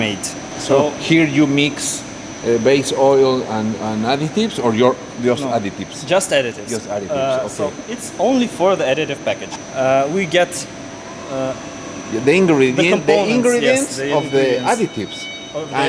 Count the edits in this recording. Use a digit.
0